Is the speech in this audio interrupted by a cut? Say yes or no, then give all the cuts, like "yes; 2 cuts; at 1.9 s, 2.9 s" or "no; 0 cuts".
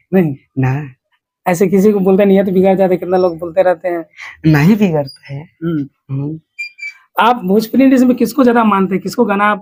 no; 0 cuts